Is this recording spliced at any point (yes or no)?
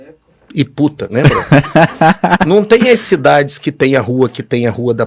yes